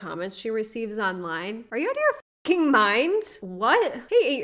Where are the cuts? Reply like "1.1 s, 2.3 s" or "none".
none

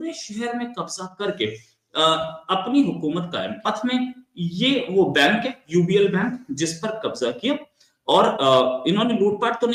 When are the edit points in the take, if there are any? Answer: none

